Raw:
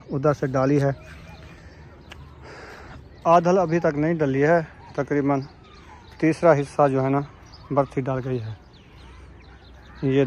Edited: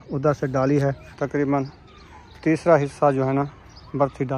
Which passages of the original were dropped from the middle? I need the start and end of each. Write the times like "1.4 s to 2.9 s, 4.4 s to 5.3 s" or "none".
1.1 s to 4.8 s